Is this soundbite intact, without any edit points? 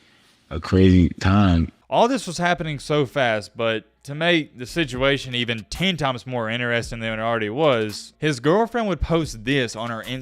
no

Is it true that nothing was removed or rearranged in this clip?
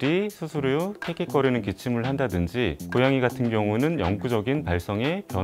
yes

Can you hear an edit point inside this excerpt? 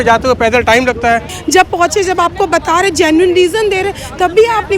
yes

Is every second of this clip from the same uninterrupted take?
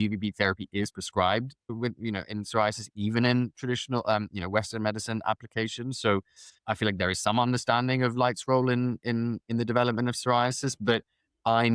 yes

